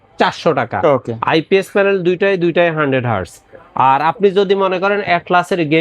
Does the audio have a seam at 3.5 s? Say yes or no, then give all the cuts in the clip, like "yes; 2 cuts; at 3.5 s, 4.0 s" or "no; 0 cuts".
no; 0 cuts